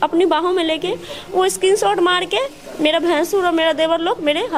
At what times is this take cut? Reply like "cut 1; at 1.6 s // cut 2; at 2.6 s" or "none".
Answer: none